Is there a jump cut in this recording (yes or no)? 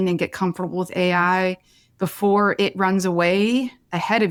no